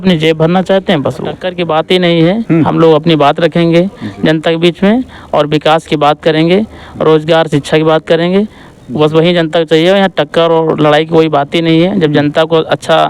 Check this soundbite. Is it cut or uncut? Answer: cut